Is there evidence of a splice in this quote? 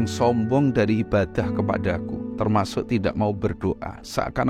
yes; 1 cut; at 2.2 s

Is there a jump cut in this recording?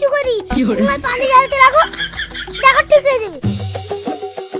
no; 0 cuts

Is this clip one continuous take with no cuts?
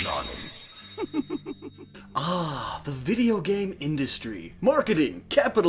yes; 0 cuts

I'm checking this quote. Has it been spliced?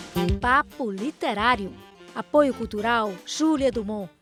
no; 0 cuts

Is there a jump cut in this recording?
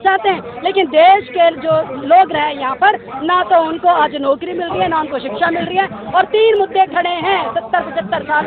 no; 0 cuts

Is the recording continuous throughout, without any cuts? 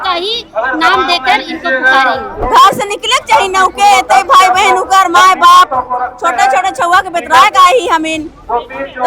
no; 1 cut; at 2.4 s

